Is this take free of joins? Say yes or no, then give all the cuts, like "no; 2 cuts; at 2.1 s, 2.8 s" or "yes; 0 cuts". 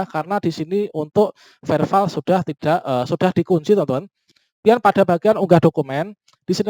no; 1 cut; at 4.2 s